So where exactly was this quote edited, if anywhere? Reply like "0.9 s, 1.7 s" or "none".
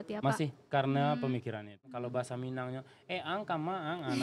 1.9 s